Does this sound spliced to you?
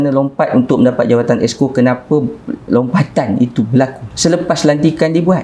yes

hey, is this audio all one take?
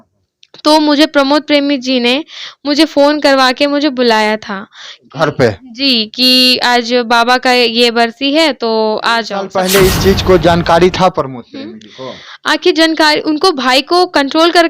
no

